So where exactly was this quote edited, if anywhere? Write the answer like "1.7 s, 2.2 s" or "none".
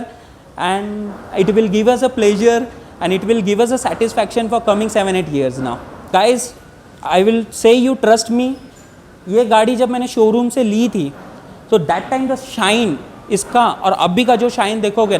6.0 s